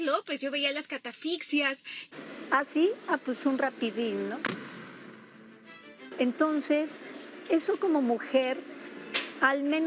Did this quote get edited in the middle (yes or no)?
yes